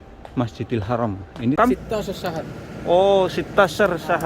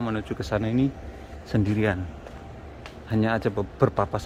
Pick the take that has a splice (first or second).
first